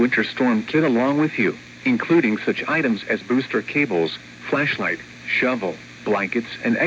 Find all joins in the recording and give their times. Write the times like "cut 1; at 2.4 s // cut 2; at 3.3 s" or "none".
cut 1; at 2.9 s